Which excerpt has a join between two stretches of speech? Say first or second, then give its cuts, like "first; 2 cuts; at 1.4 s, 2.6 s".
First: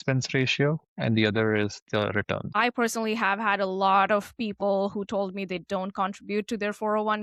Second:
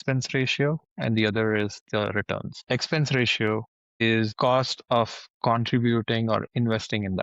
first; 1 cut; at 2.5 s